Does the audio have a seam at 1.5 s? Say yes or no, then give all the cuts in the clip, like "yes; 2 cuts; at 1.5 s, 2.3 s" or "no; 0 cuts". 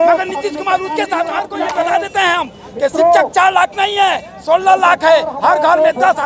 yes; 1 cut; at 1.5 s